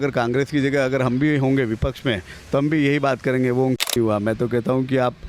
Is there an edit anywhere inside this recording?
yes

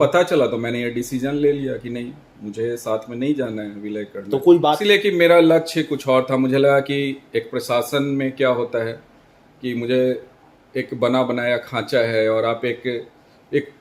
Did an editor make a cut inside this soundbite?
yes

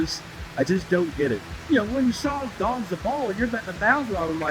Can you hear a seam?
yes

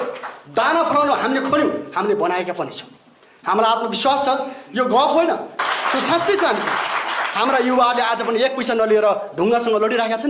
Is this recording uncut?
no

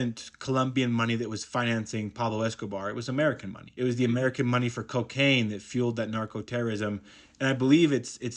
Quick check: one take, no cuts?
yes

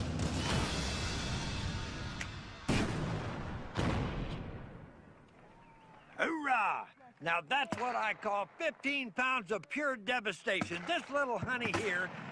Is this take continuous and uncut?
no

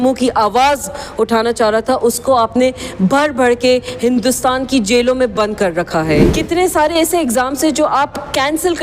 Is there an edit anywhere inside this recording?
yes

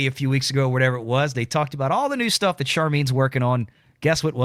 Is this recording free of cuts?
yes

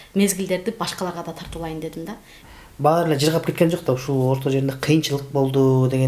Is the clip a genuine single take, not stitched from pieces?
no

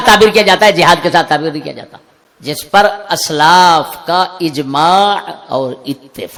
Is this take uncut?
yes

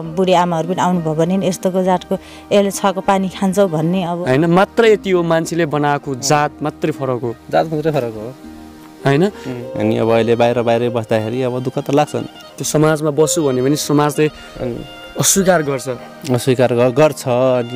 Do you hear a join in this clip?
yes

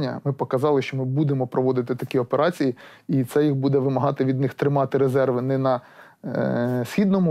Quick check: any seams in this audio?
no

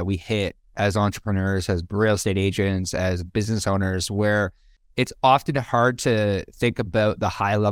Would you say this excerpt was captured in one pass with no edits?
yes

